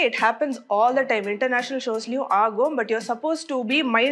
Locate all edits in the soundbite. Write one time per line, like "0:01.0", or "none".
none